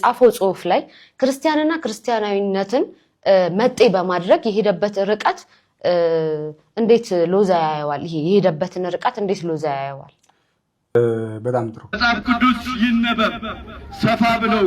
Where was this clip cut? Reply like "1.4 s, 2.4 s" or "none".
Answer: 11.8 s

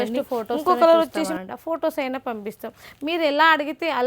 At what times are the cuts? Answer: 1.3 s

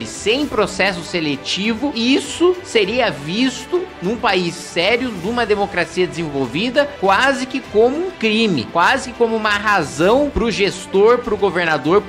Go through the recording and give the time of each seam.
none

